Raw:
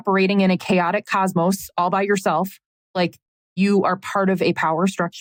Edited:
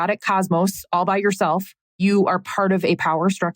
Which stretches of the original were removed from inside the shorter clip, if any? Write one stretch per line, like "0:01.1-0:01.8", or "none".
0:02.6-0:03.4